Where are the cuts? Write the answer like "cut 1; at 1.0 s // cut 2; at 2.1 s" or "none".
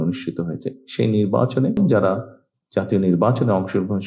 cut 1; at 1.8 s